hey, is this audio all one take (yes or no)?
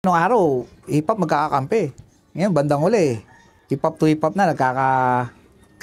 yes